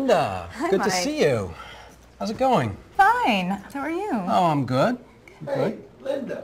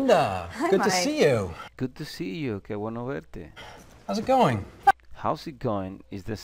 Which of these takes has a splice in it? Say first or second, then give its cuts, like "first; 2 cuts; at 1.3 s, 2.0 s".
first; 2 cuts; at 1.6 s, 3.0 s